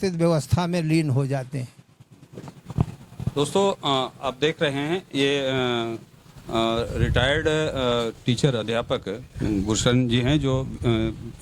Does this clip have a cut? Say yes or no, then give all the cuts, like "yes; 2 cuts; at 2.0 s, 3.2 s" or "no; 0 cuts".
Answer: no; 0 cuts